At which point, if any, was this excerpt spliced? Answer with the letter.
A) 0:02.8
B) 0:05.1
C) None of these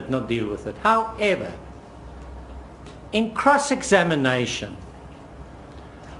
A